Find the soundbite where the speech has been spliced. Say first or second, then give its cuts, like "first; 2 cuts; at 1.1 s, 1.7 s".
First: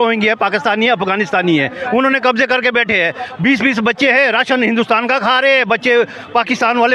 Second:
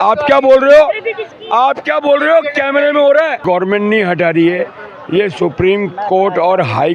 second; 1 cut; at 3.4 s